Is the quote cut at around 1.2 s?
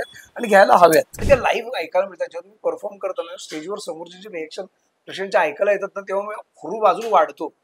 yes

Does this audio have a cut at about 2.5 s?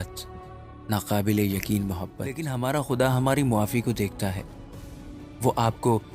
yes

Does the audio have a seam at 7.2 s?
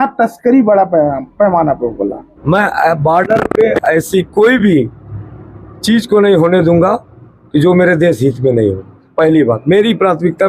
no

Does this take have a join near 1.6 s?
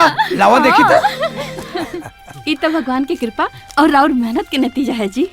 yes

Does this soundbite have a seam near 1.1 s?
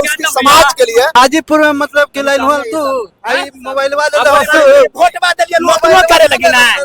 yes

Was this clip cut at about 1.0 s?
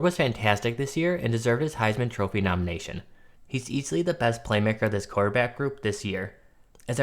no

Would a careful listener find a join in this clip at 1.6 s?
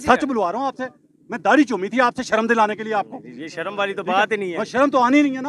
no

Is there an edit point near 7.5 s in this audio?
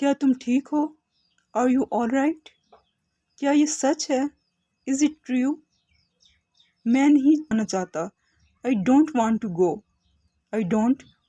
yes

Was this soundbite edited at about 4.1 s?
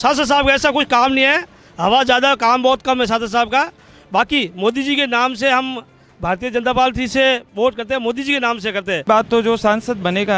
no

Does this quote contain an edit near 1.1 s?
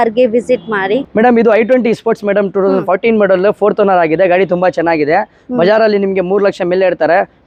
no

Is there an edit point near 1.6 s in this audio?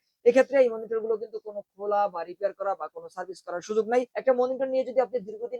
no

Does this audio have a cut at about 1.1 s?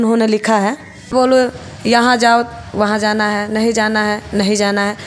yes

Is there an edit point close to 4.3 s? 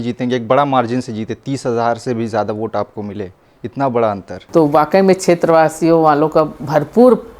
yes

